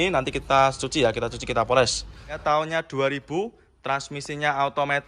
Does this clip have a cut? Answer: yes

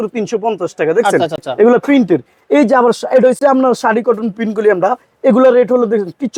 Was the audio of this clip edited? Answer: no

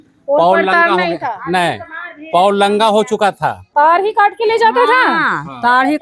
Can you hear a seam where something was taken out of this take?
yes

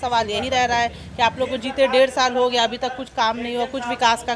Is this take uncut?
yes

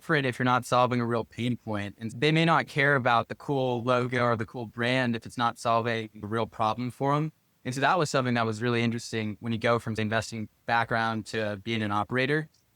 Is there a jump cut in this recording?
no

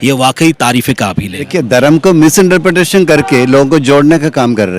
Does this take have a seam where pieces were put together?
yes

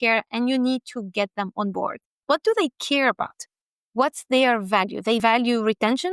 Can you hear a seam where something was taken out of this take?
yes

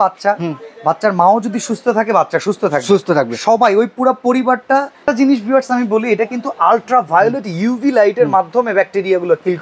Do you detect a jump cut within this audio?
yes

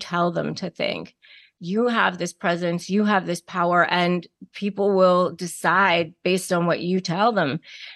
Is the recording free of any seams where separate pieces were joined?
yes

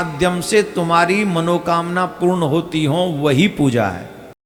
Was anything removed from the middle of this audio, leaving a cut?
no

